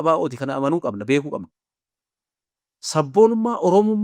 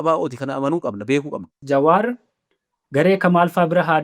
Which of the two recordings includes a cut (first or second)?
second